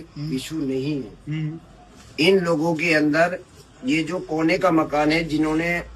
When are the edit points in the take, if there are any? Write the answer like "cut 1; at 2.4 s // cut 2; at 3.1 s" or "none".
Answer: none